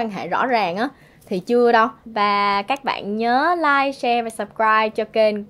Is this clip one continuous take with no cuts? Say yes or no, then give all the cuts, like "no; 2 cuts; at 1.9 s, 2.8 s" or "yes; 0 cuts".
no; 1 cut; at 2.0 s